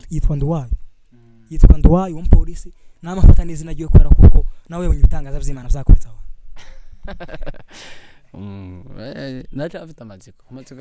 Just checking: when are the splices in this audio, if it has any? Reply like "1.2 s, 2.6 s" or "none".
none